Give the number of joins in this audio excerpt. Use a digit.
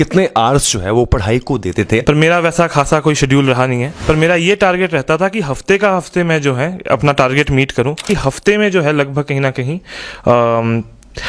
3